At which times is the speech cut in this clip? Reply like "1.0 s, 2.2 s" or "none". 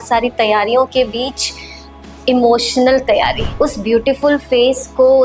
3.4 s